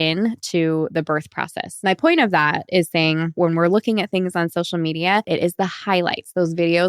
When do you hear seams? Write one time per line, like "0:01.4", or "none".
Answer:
0:01.6
0:03.3
0:05.3